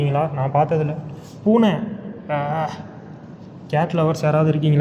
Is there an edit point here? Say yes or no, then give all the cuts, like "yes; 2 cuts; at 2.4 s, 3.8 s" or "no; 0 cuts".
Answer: no; 0 cuts